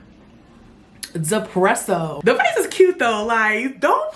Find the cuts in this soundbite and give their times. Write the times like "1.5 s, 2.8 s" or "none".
2.2 s